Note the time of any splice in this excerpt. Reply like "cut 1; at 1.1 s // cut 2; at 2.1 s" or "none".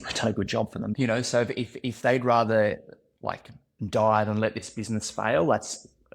cut 1; at 1.1 s